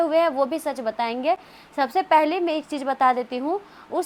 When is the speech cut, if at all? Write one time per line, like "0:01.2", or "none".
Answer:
none